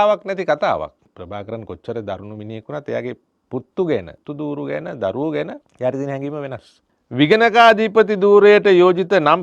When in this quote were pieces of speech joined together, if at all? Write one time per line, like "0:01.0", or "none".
0:01.1
0:03.3
0:04.2
0:05.6
0:07.0